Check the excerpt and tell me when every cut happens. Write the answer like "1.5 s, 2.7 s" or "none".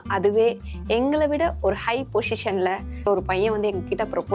3.0 s